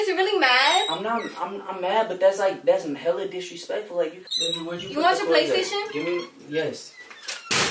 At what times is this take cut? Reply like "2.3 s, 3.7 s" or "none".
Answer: 4.2 s